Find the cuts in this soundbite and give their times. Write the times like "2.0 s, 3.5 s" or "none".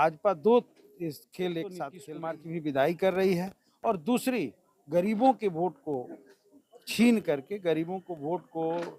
1.9 s